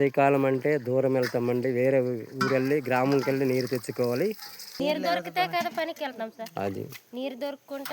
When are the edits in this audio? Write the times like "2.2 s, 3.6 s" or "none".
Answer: 4.8 s